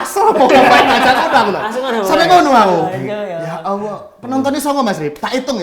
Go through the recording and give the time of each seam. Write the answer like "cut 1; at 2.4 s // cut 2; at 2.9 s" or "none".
none